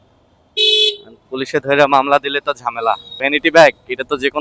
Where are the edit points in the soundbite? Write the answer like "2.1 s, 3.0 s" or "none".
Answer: 3.2 s

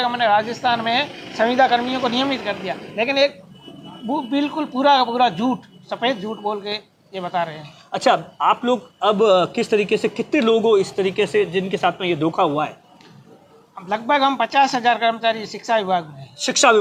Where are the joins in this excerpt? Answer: none

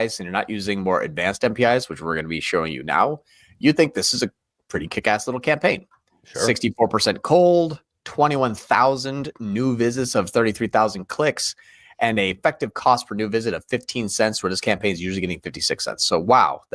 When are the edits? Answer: none

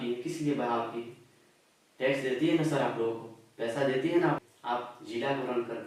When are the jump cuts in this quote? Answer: 4.4 s

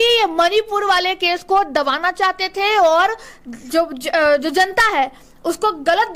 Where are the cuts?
none

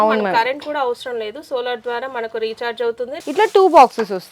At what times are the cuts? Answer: 3.1 s

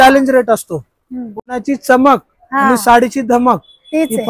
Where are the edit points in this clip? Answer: 1.4 s

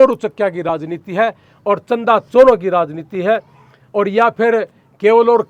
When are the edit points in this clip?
none

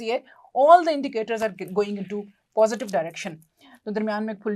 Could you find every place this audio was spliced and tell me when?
none

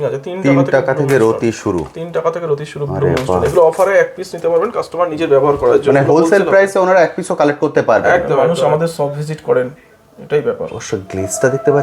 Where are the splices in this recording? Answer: 8.5 s

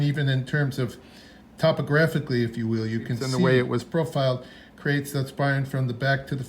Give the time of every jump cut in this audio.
3.3 s

